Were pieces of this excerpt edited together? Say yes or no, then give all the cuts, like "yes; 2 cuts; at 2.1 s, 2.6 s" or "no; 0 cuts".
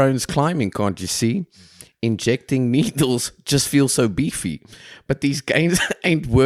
no; 0 cuts